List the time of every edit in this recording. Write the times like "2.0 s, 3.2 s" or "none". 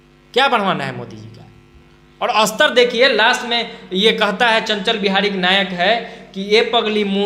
none